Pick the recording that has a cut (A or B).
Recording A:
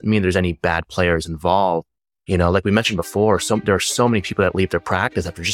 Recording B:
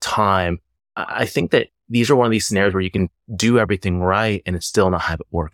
B